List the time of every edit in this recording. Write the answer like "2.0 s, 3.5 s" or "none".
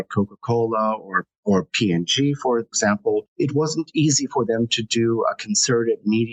2.9 s